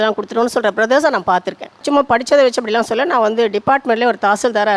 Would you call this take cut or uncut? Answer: cut